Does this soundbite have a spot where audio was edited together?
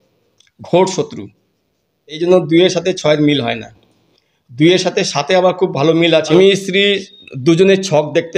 yes; 2 cuts; at 2.2 s, 6.3 s

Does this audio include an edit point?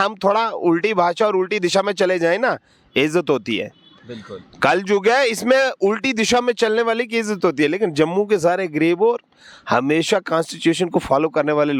no; 0 cuts

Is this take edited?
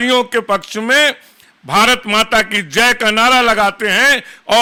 no; 0 cuts

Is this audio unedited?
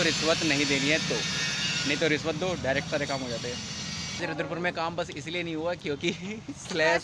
no; 1 cut; at 4.2 s

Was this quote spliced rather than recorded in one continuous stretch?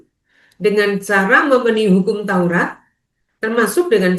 no; 0 cuts

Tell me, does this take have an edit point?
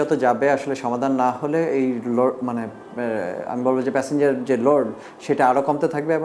no; 0 cuts

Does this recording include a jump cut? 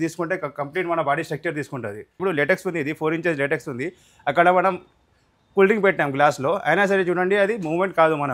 yes; 1 cut; at 2.2 s

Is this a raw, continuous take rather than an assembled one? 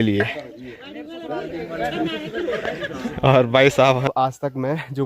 no; 1 cut; at 4.0 s

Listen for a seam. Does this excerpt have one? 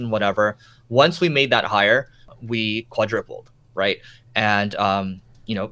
yes; 1 cut; at 2.3 s

